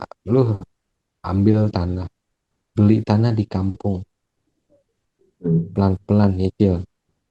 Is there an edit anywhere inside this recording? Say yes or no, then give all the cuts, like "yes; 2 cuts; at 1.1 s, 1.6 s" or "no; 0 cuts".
no; 0 cuts